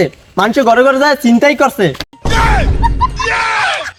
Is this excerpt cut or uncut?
uncut